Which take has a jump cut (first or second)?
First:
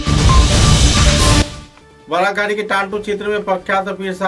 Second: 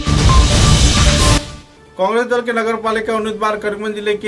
second